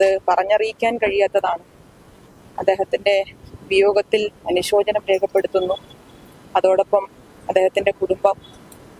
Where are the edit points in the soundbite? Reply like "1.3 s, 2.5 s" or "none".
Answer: none